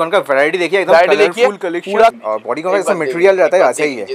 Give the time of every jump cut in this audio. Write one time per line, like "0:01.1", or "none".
0:02.2